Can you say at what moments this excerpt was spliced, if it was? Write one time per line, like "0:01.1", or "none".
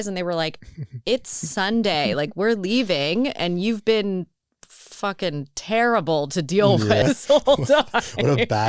0:07.0